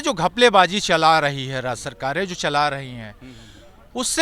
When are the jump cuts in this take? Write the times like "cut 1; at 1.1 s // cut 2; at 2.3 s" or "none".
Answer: none

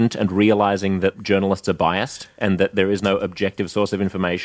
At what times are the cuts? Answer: cut 1; at 1.2 s

